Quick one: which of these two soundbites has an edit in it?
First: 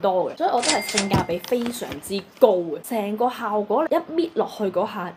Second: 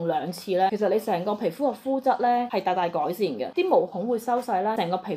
first; 2 cuts; at 2.8 s, 3.9 s

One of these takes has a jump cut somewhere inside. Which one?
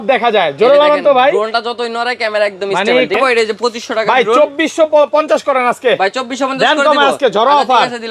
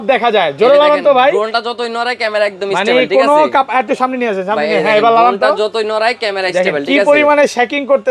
first; 1 cut; at 3.1 s

